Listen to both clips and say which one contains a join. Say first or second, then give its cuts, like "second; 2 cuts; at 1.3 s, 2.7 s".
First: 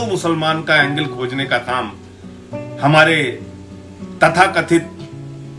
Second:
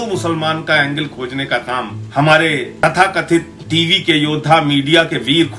second; 3 cuts; at 2.0 s, 2.7 s, 3.6 s